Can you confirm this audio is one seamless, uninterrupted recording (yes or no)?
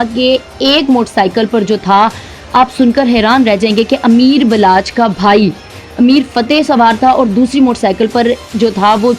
yes